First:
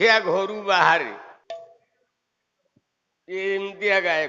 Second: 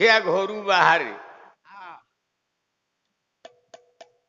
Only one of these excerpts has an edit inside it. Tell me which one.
first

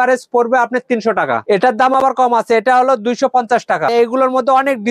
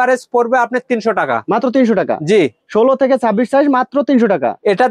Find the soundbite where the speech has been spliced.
first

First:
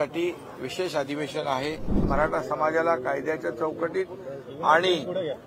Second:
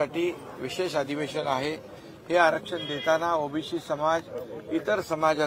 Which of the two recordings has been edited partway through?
first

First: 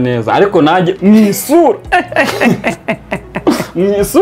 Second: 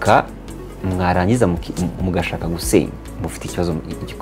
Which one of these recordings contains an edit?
second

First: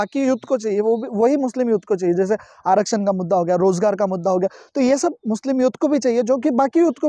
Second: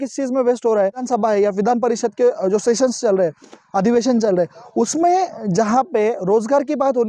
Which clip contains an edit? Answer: second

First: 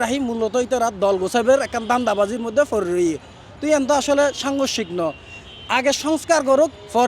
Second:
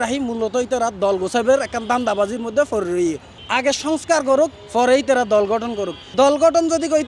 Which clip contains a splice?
second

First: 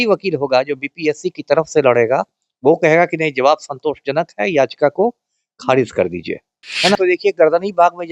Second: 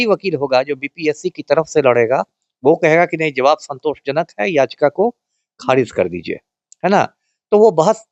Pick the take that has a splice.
first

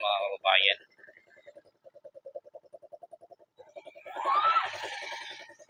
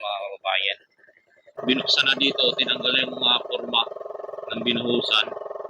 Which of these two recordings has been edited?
second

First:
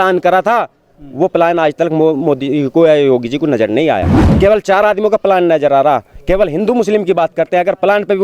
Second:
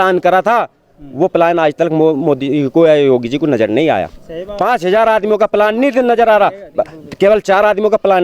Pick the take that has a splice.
first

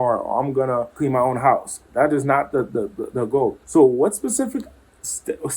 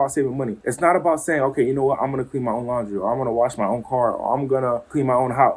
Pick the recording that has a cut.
first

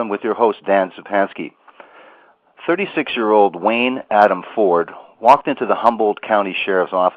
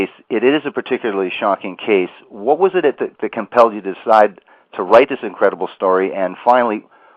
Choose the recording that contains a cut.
second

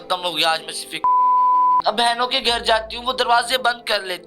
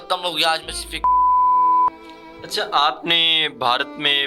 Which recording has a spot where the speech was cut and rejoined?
first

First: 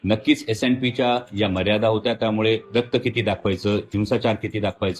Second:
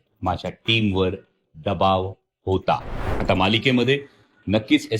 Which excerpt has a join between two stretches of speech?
second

